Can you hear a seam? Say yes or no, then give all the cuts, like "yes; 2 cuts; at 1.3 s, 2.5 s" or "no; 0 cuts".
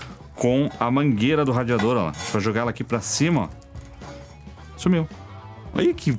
no; 0 cuts